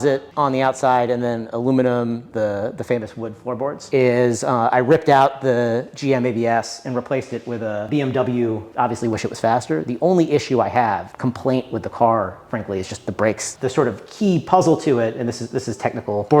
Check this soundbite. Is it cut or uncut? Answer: cut